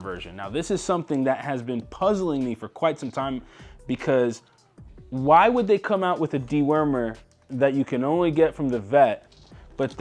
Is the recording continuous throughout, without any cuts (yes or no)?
yes